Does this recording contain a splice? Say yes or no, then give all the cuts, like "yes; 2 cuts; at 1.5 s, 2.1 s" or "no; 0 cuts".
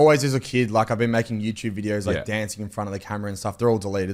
no; 0 cuts